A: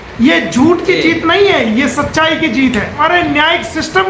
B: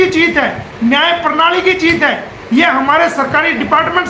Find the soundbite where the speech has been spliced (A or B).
A